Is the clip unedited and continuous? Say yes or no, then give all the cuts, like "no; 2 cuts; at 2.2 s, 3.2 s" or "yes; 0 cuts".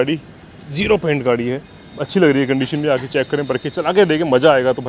yes; 0 cuts